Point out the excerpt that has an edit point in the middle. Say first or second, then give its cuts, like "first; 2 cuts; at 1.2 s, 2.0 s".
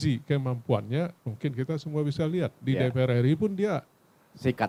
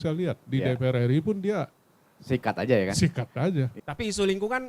second; 1 cut; at 3.7 s